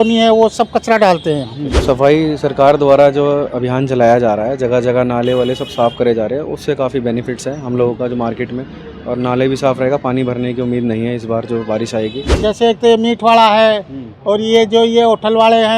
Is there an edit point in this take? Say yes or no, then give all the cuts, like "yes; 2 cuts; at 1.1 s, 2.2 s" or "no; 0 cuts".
yes; 2 cuts; at 1.8 s, 12.3 s